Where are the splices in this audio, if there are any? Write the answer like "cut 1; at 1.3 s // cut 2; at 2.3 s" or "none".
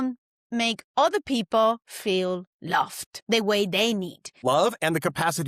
cut 1; at 3.1 s // cut 2; at 4.3 s